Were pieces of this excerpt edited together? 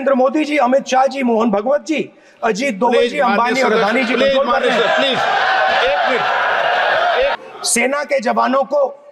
yes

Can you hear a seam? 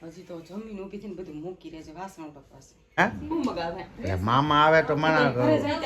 yes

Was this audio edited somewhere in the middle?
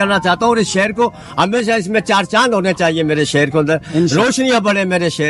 no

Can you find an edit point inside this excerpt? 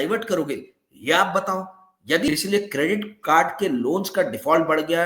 yes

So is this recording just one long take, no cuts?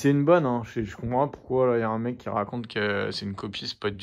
yes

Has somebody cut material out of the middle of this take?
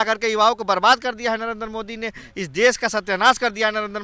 no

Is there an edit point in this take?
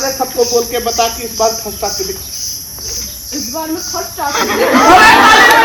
no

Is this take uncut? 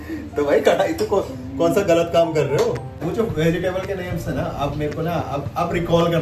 no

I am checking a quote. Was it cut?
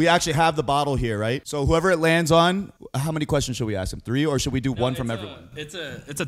yes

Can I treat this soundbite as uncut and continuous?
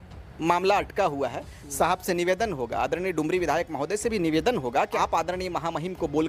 no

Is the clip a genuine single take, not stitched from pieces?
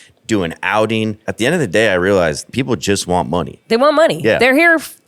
no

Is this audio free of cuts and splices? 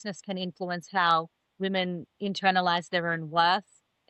yes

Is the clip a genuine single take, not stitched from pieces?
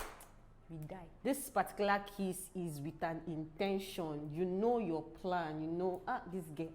no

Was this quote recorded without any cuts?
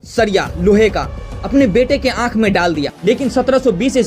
no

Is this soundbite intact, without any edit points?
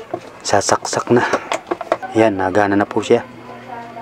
no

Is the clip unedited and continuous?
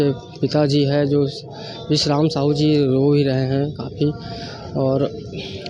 yes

